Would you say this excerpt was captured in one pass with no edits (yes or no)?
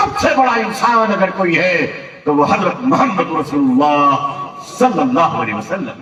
yes